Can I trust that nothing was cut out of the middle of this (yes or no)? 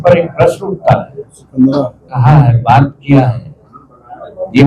no